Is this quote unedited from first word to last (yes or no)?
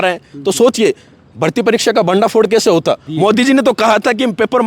no